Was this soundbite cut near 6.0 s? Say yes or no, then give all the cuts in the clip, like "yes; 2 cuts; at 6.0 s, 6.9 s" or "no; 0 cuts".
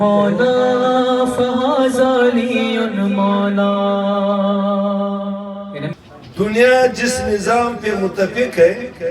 yes; 1 cut; at 6.0 s